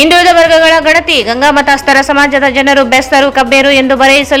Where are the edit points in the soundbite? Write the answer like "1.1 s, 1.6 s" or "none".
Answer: none